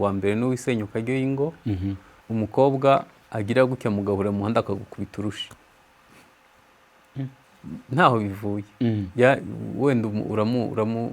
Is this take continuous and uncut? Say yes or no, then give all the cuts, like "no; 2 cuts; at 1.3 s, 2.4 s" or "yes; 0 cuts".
no; 1 cut; at 2.1 s